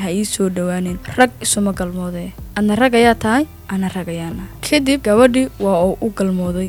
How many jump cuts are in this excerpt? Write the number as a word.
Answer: zero